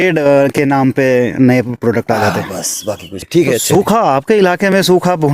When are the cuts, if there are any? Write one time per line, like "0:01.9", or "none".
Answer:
0:03.1